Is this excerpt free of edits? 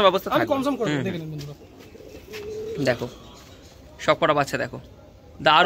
yes; 0 cuts

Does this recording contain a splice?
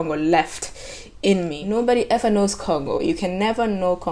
yes; 1 cut; at 1.6 s

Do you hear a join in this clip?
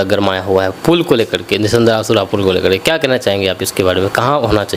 no; 0 cuts

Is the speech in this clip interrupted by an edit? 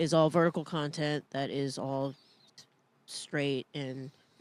no; 0 cuts

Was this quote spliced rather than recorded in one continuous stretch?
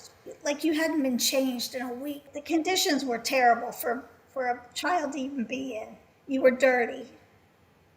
yes; 1 cut; at 2.2 s

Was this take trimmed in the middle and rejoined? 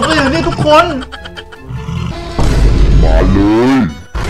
yes; 1 cut; at 2.1 s

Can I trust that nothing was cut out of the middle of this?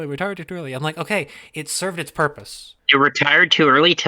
no; 1 cut; at 2.7 s

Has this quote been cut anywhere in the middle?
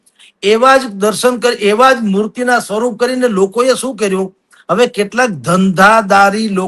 no; 0 cuts

